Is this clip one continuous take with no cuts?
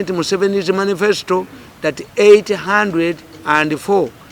yes; 0 cuts

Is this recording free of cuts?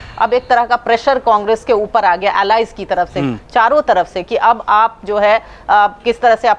yes; 0 cuts

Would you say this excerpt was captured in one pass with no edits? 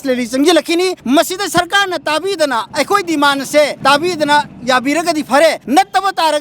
no; 4 cuts; at 1.0 s, 2.7 s, 3.8 s, 5.6 s

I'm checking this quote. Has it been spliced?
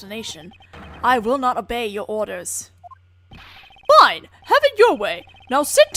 no; 0 cuts

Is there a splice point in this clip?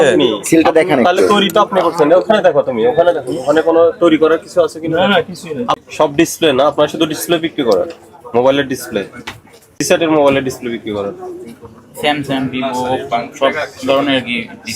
yes; 2 cuts; at 5.8 s, 9.8 s

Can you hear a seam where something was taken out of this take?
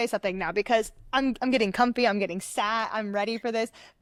no; 0 cuts

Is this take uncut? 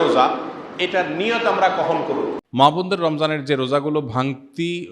no; 1 cut; at 2.4 s

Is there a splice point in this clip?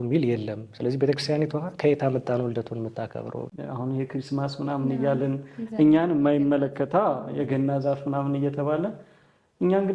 yes; 1 cut; at 3.5 s

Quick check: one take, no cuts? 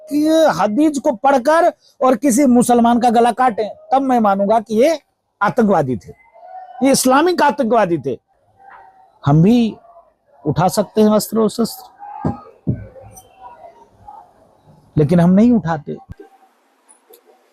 no; 1 cut; at 8.3 s

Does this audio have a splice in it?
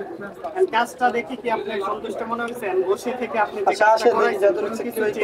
no; 0 cuts

